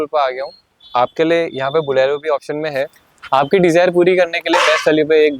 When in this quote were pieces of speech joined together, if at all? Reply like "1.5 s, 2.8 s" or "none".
3.1 s